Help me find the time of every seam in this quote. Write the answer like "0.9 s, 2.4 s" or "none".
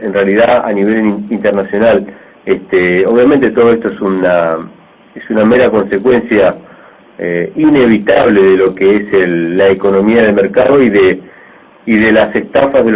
none